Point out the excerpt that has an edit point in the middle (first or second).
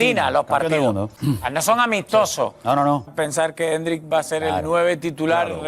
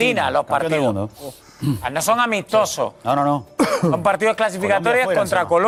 first